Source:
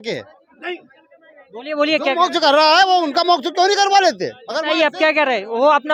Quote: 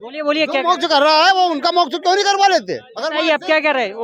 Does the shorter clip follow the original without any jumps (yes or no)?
yes